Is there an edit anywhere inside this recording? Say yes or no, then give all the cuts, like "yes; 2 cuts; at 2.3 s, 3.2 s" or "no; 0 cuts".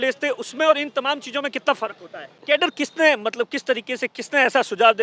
yes; 1 cut; at 2.4 s